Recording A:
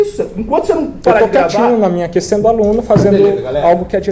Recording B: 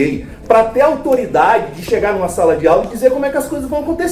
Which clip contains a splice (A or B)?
A